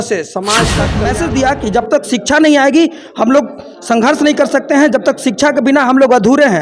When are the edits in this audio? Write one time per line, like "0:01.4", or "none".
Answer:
0:01.0

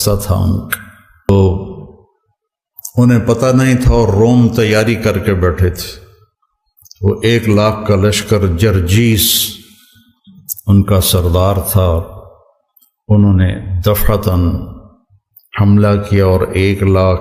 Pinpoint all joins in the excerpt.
0:01.3

